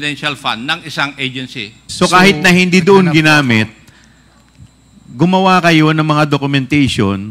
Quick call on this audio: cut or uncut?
cut